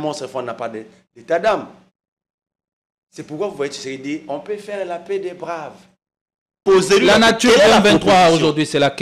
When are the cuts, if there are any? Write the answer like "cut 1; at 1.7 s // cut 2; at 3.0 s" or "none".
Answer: cut 1; at 6.5 s